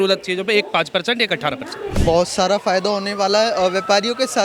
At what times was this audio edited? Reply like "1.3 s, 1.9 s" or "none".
2.0 s

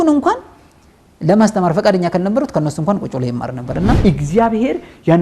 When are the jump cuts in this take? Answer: 4.0 s

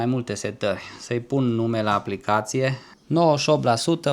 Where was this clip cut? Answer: 2.9 s

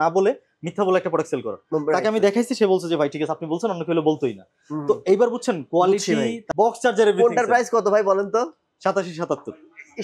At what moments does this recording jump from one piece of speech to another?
6.4 s

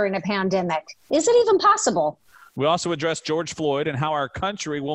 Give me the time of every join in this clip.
none

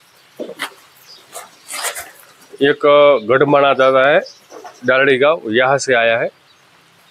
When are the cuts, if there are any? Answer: none

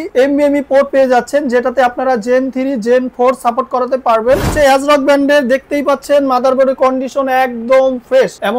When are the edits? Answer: 4.5 s

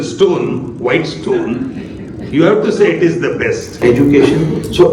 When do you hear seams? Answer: 3.8 s

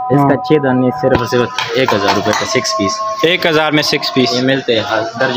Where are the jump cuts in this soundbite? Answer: none

